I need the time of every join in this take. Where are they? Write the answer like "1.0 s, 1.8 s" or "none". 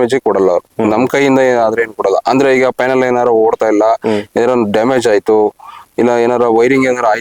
none